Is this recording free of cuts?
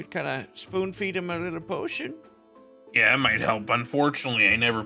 yes; 0 cuts

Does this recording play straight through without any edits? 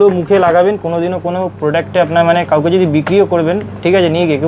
yes; 0 cuts

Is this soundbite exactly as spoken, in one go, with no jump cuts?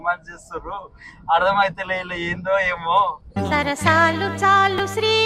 yes; 0 cuts

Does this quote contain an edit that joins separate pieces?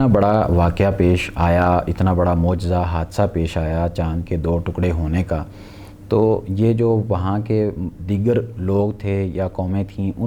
no; 0 cuts

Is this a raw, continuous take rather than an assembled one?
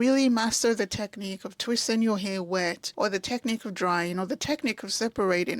no; 1 cut; at 2.8 s

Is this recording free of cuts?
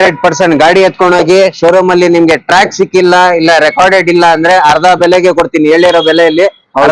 yes; 0 cuts

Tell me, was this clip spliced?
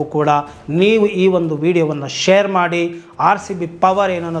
no; 0 cuts

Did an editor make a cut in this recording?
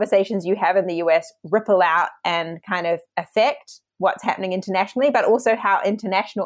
no; 0 cuts

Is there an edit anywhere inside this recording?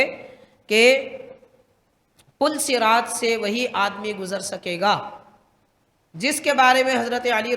no; 0 cuts

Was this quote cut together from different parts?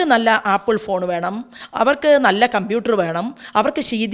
no; 0 cuts

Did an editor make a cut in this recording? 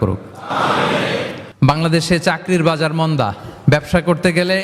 yes; 1 cut; at 1.4 s

